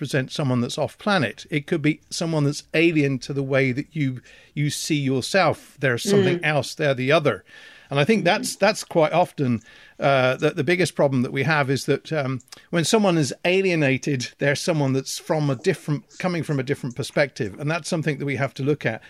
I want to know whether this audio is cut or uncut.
uncut